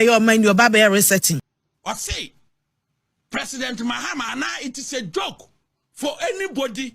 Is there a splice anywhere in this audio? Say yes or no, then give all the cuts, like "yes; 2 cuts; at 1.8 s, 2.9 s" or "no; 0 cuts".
yes; 1 cut; at 1.4 s